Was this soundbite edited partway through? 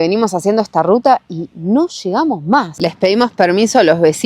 yes; 1 cut; at 2.8 s

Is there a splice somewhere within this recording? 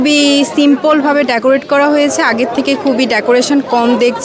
no; 0 cuts

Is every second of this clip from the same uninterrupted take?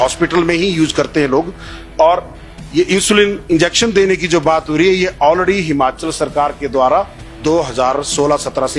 yes; 0 cuts

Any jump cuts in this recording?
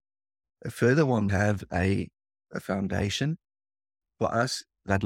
yes; 1 cut; at 1.3 s

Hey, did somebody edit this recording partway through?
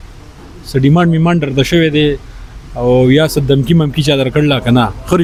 no; 0 cuts

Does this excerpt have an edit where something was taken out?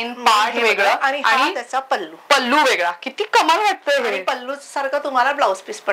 no; 0 cuts

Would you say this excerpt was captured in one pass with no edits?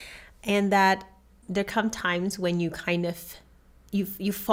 yes; 0 cuts

